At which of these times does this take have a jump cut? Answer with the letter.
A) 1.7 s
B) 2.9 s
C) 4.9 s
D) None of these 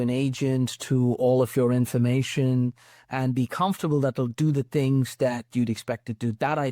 D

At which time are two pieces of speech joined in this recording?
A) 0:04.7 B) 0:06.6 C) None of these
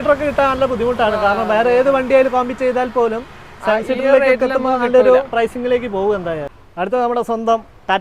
B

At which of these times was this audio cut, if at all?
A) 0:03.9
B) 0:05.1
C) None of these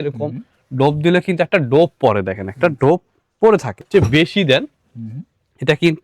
A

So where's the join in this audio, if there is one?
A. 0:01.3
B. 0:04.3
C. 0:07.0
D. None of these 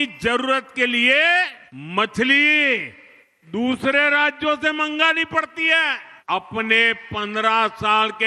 D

